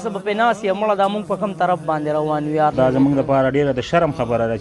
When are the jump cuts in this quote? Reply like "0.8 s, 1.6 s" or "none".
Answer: 2.7 s